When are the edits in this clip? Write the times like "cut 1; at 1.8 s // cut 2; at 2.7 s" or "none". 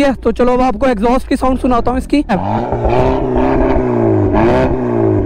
cut 1; at 2.3 s